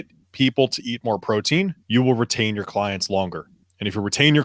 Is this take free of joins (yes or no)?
no